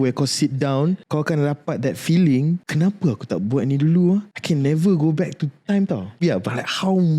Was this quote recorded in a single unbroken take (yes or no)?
no